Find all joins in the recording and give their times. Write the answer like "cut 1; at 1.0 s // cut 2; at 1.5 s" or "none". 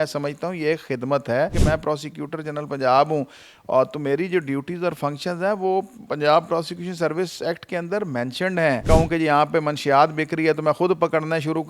cut 1; at 1.6 s // cut 2; at 8.8 s